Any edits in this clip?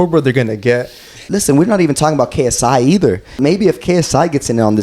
yes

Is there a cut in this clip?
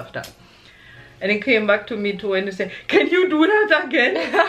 no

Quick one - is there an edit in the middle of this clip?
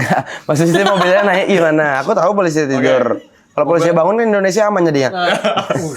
no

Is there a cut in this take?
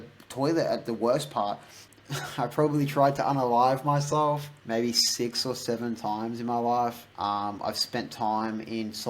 yes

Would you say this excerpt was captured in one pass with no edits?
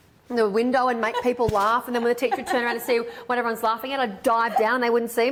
yes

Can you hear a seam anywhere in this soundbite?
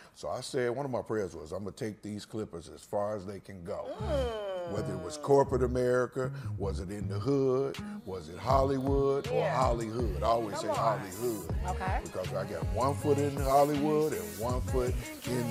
no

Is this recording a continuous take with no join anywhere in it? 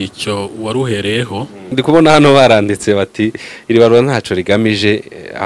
no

